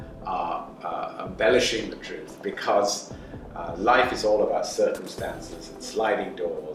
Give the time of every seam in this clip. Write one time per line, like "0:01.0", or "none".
none